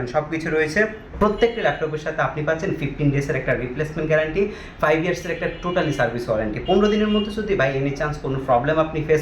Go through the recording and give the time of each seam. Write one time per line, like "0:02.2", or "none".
0:01.1

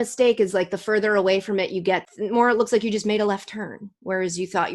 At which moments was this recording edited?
0:02.1

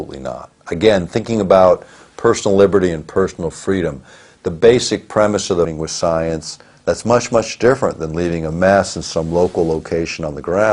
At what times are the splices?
none

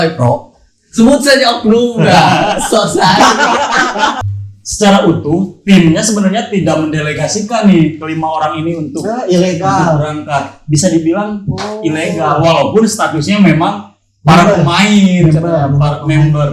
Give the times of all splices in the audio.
0:04.2

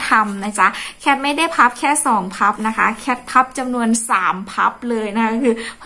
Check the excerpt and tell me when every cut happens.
none

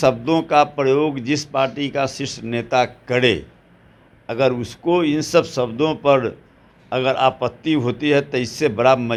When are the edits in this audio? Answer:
none

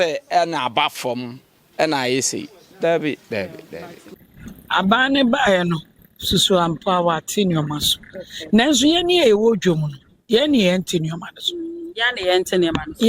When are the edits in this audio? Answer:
none

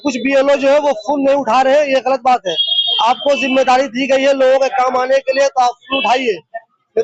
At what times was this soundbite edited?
none

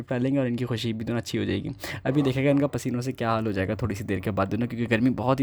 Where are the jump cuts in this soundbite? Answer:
none

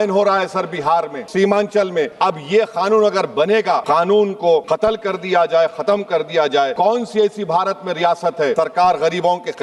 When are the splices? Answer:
0:01.2
0:02.1
0:03.8
0:04.6
0:06.7
0:08.5

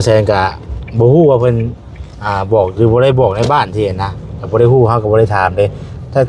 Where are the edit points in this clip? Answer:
none

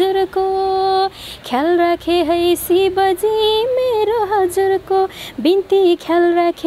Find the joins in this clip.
none

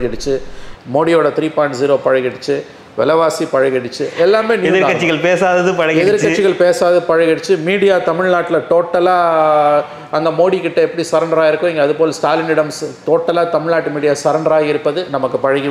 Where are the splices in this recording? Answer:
none

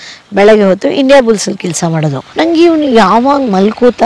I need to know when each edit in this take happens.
0:02.2

